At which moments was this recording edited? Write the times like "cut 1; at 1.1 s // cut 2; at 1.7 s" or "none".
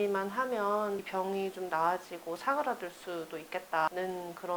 none